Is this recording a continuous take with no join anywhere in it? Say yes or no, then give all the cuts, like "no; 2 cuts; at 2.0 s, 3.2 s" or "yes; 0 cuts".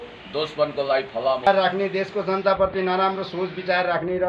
no; 1 cut; at 1.5 s